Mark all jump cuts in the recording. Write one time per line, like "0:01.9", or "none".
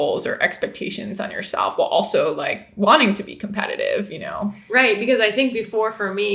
none